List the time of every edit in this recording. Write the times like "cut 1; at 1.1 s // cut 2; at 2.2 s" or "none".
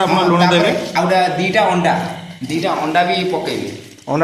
none